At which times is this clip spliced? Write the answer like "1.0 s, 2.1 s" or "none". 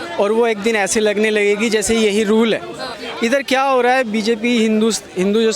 3.0 s